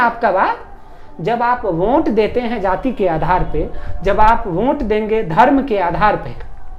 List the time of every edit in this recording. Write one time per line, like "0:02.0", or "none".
none